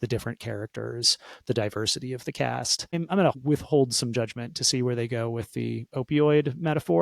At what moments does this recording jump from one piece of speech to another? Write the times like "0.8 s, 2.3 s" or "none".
3.2 s